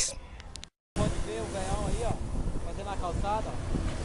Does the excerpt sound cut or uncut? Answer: cut